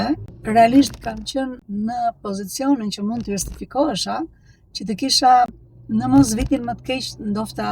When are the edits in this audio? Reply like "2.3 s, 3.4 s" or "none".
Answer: 1.6 s